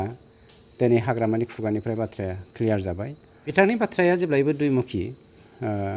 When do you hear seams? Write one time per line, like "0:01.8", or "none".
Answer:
0:03.5

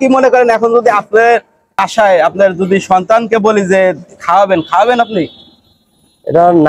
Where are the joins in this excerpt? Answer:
0:01.8

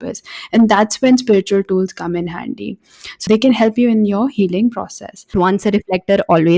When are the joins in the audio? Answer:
0:03.2
0:05.3

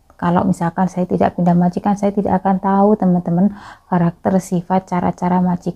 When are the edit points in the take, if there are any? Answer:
none

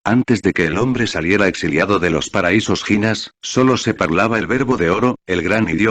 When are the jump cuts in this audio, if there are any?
none

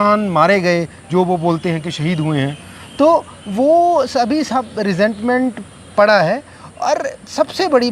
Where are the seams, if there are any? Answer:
none

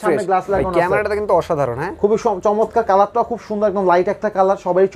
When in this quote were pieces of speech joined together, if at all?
none

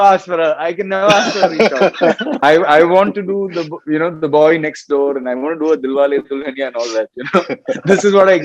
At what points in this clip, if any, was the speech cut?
0:02.3

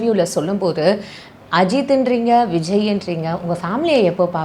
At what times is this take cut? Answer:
none

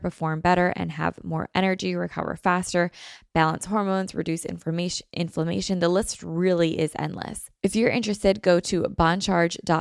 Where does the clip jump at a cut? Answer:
0:07.4

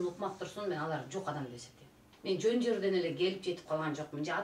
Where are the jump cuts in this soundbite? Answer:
0:02.1

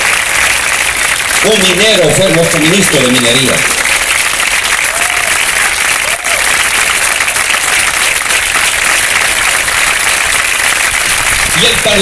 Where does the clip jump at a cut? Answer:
none

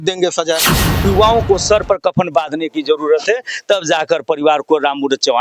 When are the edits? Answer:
0:01.0

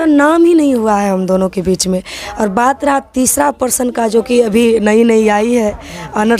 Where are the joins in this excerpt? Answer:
none

